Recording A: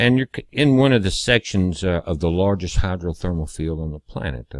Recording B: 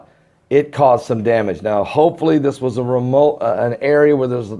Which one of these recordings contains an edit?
B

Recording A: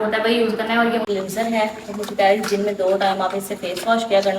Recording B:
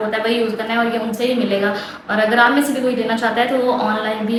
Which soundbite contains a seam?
A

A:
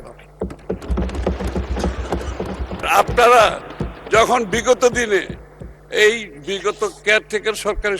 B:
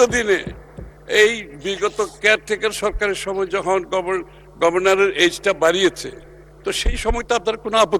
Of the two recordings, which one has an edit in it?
A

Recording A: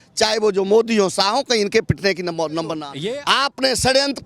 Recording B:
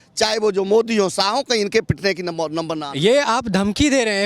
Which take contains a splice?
A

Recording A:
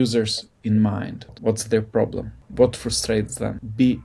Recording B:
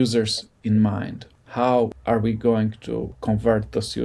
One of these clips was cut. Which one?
A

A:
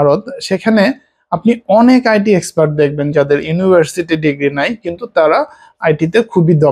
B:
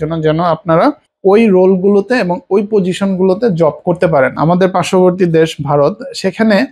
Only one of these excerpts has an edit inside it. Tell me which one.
B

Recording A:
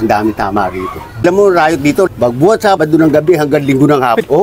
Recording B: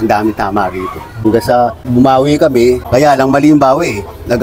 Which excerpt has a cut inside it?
A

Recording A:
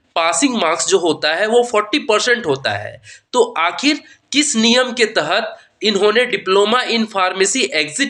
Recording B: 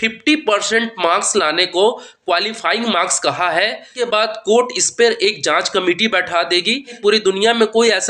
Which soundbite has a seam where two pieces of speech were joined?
B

